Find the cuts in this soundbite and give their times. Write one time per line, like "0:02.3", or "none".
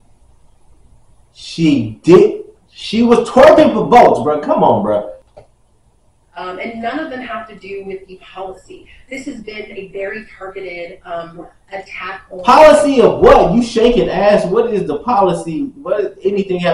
0:05.2